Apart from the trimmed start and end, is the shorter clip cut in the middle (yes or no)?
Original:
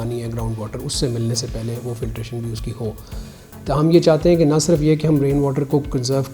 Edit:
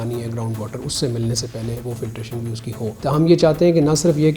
yes